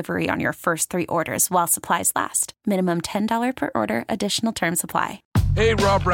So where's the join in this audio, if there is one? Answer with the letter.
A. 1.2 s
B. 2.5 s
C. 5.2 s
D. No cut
C